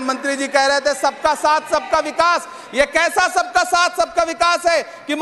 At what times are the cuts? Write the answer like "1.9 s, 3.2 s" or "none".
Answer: none